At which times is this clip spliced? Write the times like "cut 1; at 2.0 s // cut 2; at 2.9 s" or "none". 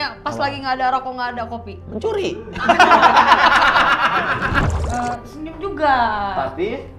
cut 1; at 4.6 s